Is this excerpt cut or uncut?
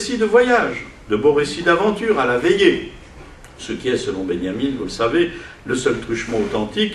cut